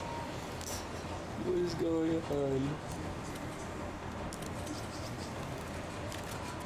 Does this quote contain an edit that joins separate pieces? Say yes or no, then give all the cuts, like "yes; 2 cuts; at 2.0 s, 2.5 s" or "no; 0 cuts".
no; 0 cuts